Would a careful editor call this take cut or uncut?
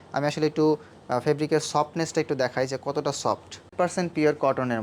cut